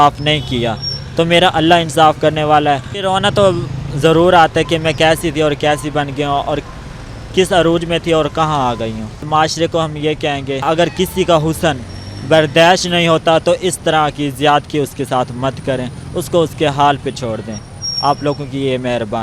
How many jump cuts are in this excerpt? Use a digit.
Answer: 3